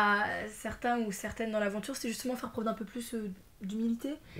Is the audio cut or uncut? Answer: uncut